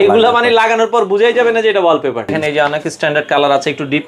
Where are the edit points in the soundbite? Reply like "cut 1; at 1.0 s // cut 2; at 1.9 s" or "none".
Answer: cut 1; at 2.4 s

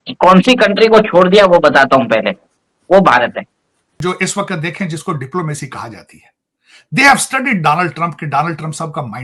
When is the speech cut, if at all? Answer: cut 1; at 3.9 s

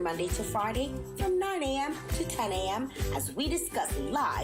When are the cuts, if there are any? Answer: none

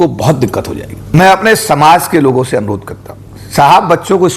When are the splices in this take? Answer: cut 1; at 0.9 s

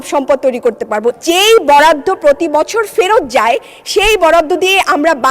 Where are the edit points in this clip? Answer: cut 1; at 1.2 s

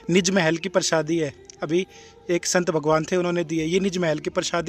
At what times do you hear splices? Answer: none

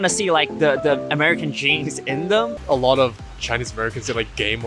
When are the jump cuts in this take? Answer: cut 1; at 2.6 s

